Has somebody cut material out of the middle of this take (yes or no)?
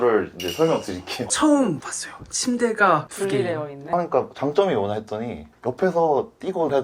yes